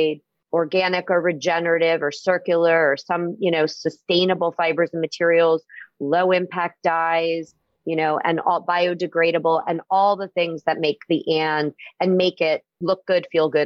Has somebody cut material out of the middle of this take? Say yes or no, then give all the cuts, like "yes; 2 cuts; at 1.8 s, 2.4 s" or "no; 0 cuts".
yes; 1 cut; at 12.7 s